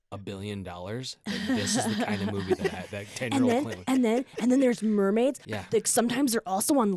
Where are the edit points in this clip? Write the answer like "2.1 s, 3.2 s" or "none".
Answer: none